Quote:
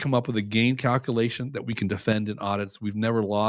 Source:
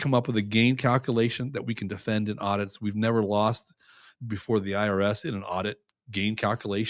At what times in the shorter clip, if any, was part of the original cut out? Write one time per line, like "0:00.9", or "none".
none